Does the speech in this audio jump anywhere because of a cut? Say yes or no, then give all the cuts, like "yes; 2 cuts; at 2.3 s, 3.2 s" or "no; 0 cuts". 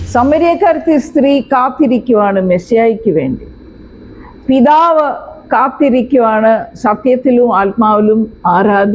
no; 0 cuts